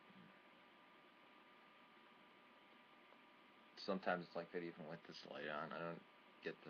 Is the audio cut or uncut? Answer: uncut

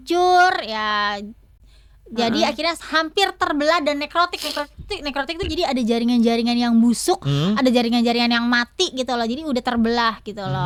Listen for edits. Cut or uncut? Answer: uncut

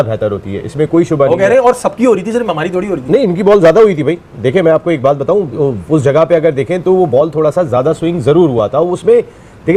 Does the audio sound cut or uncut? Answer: uncut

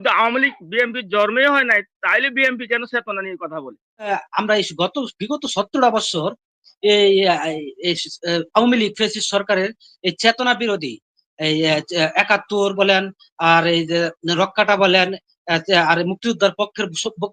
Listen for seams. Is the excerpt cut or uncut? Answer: cut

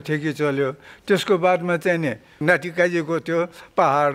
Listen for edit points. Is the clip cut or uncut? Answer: cut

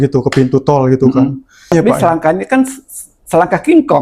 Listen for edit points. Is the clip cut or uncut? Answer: cut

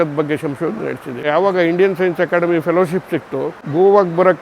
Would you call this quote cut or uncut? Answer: cut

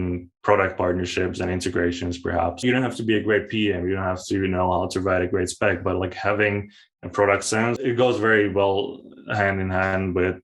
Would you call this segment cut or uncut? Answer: cut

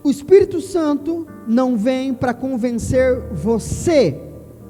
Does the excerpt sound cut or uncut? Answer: uncut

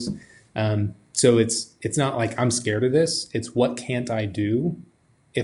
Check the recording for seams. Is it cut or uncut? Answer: uncut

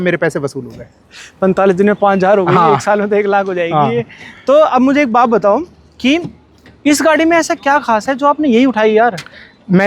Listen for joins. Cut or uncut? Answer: uncut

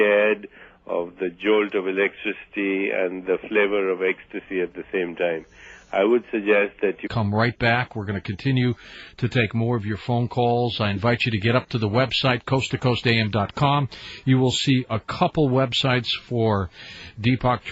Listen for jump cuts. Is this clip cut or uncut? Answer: uncut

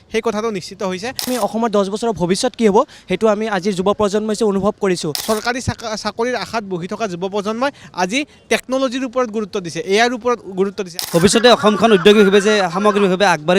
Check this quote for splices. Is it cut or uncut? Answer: cut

